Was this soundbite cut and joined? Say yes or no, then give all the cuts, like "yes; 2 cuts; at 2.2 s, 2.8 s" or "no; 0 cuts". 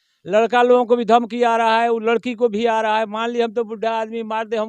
no; 0 cuts